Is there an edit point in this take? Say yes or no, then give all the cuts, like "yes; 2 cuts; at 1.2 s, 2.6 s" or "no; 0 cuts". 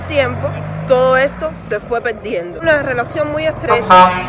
yes; 1 cut; at 2.6 s